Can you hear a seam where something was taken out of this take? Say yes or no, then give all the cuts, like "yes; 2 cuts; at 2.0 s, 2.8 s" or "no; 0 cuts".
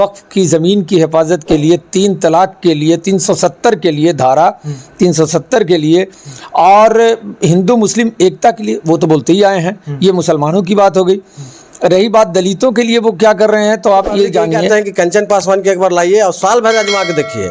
yes; 1 cut; at 14.7 s